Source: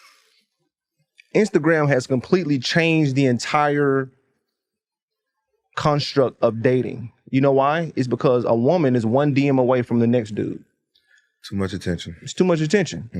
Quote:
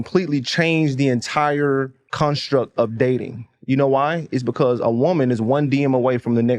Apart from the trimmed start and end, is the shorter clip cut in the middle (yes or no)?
yes